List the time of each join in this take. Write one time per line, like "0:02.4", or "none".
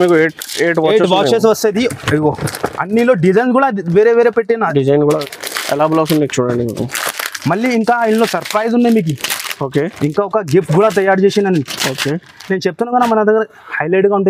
0:05.2